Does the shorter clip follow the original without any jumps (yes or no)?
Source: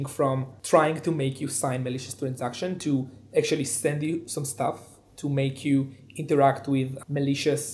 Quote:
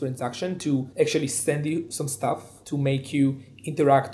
no